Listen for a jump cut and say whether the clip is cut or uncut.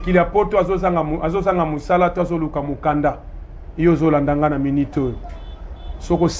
uncut